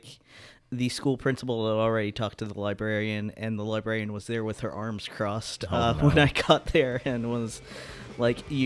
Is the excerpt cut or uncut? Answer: uncut